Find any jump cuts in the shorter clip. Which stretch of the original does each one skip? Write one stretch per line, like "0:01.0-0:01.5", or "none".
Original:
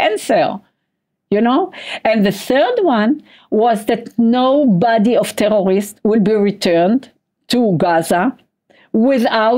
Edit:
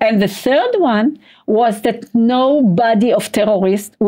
none